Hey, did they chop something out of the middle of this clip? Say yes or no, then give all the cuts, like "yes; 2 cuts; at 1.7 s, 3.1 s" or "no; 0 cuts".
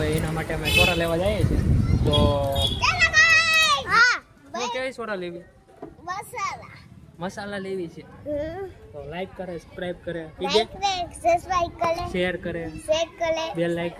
yes; 1 cut; at 3.9 s